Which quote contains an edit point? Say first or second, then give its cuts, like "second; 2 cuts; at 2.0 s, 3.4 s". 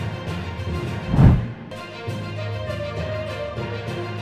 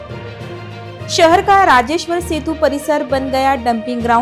second; 1 cut; at 0.9 s